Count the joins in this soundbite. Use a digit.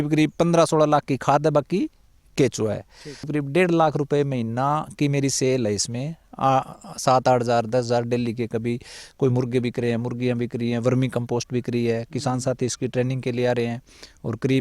1